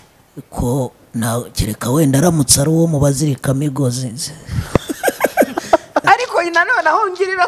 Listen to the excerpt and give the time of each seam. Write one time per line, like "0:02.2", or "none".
0:06.0